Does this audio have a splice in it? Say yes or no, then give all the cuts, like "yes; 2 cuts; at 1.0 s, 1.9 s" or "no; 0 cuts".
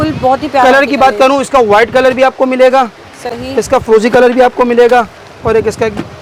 no; 0 cuts